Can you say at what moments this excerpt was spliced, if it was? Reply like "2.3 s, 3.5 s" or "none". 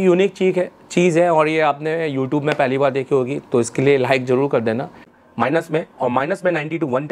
5.2 s

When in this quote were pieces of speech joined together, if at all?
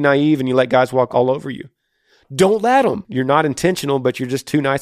1.1 s, 3.0 s

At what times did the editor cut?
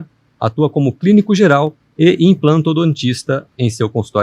1.8 s

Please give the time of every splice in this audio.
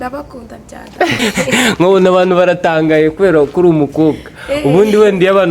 1.2 s

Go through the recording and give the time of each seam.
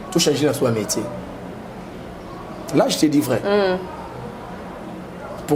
none

